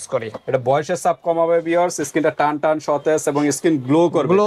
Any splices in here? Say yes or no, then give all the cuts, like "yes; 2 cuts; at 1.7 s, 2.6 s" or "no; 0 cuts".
no; 0 cuts